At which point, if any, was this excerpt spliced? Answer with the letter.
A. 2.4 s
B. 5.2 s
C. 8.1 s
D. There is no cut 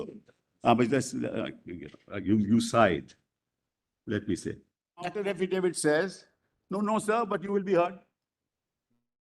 B